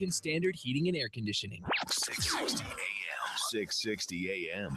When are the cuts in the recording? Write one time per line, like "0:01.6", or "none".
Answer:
0:01.5